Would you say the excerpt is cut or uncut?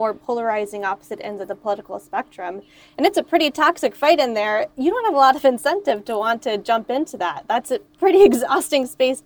uncut